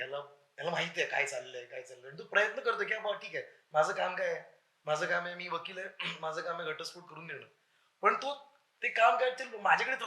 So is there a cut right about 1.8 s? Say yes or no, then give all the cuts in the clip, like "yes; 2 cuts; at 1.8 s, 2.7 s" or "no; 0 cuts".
no; 0 cuts